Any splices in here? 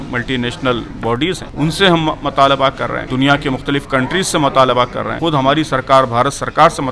yes; 3 cuts; at 1.5 s, 3.0 s, 5.1 s

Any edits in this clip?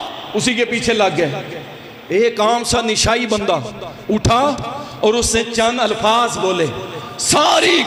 no; 0 cuts

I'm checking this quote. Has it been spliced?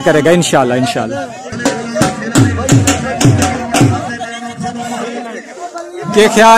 no; 0 cuts

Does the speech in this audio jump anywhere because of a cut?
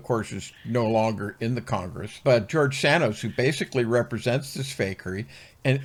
no; 0 cuts

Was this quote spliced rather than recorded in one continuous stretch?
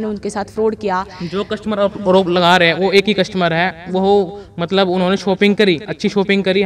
no; 0 cuts

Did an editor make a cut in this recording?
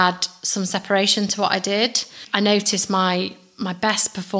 yes; 1 cut; at 2.2 s

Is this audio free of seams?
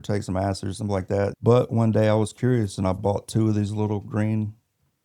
no; 2 cuts; at 1.3 s, 3.0 s

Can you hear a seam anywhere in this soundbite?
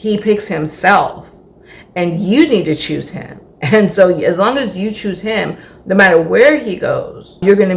no; 0 cuts

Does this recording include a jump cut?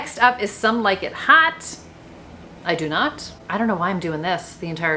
yes; 1 cut; at 3.4 s

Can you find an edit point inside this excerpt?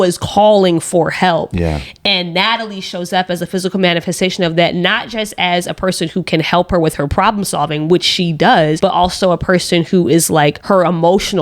yes; 2 cuts; at 8.8 s, 10.6 s

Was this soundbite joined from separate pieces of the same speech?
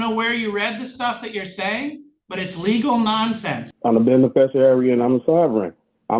yes; 1 cut; at 3.7 s

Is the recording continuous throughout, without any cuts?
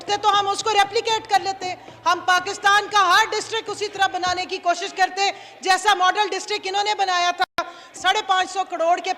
no; 1 cut; at 7.9 s

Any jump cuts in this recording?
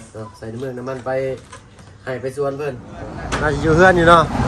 yes; 1 cut; at 3.2 s

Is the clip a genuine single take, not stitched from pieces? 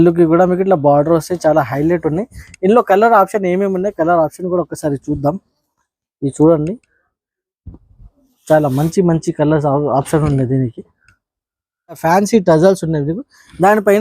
no; 1 cut; at 12.0 s

